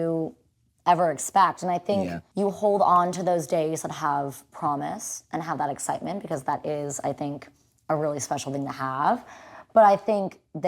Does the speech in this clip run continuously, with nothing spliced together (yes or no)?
no